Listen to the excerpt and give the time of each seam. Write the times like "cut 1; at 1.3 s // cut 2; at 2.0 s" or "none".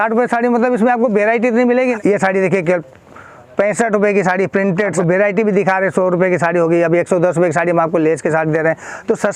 cut 1; at 1.9 s // cut 2; at 4.9 s